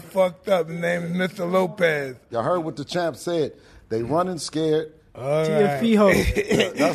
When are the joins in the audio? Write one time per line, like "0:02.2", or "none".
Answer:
0:02.3
0:05.0